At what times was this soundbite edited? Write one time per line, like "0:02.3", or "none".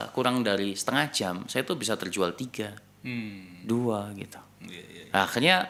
none